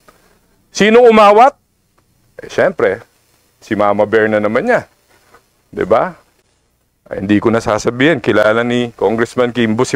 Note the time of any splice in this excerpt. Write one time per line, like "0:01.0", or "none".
none